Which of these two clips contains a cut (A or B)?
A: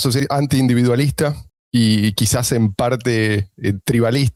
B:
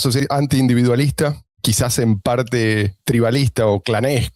B